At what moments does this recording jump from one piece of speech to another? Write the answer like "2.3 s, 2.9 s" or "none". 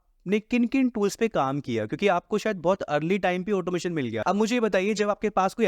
4.2 s